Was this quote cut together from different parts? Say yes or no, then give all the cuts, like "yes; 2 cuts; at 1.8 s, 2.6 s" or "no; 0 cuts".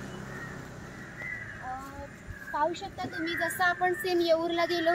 no; 0 cuts